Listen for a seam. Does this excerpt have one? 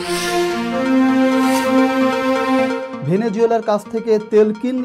yes; 1 cut; at 2.9 s

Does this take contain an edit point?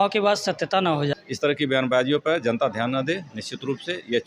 yes; 1 cut; at 1.2 s

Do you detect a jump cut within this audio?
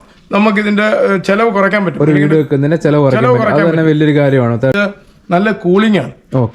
yes; 1 cut; at 4.8 s

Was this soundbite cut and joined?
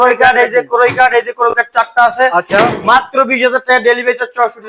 no; 0 cuts

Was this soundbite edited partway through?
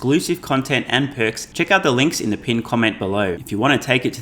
yes; 2 cuts; at 1.4 s, 3.4 s

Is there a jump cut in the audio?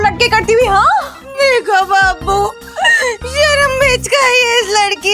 yes; 1 cut; at 1.2 s

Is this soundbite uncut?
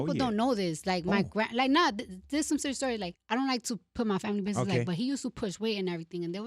no; 1 cut; at 3.2 s

